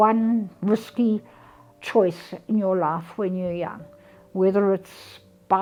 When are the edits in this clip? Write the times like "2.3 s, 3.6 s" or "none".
none